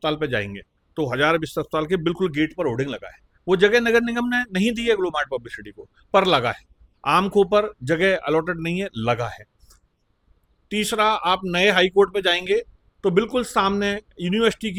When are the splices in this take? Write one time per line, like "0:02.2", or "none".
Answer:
none